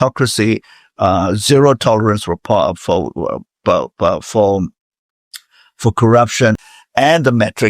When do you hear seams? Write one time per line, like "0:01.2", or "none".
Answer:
0:06.6